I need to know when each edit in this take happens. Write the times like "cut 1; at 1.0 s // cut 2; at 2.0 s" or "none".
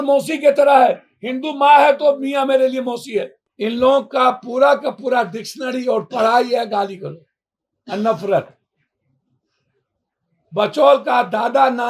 cut 1; at 3.4 s